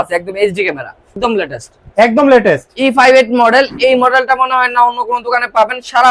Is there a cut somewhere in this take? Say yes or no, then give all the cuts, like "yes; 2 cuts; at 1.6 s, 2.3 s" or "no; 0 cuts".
yes; 1 cut; at 1.1 s